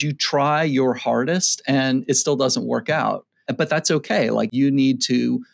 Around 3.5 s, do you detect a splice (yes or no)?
yes